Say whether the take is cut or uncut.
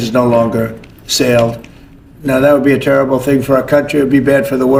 uncut